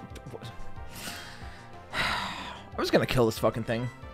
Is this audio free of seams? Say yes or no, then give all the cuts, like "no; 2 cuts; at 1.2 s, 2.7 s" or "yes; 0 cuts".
yes; 0 cuts